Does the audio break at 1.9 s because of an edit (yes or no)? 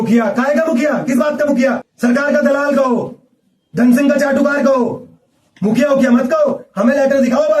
yes